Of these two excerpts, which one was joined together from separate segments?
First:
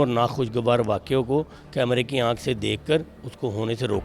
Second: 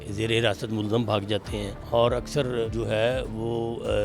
second; 2 cuts; at 1.7 s, 2.7 s

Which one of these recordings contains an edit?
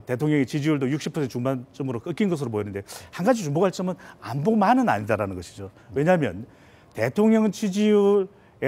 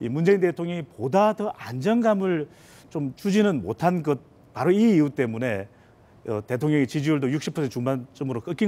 second; 1 cut; at 2.5 s

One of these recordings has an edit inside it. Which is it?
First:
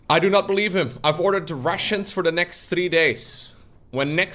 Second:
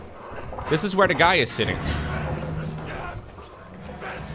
first; 1 cut; at 0.9 s

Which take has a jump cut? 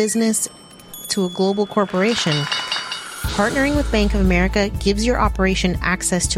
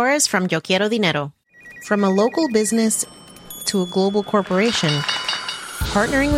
second; 1 cut; at 1.4 s

